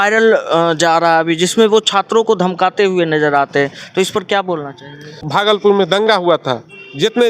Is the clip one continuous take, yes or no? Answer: no